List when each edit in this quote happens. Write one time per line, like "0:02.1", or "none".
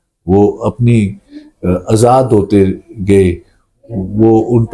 none